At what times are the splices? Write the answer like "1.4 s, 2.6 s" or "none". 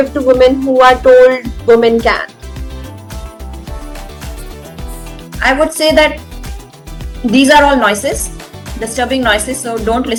none